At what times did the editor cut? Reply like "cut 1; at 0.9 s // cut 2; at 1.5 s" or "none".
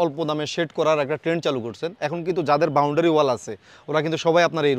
none